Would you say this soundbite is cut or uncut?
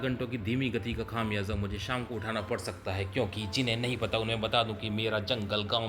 uncut